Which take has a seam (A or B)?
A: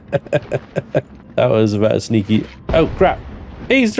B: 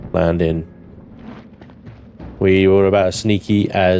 A